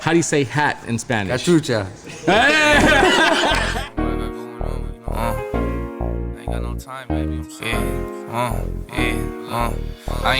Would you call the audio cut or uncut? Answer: cut